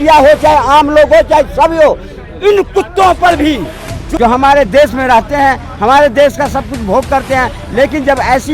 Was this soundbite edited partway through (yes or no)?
yes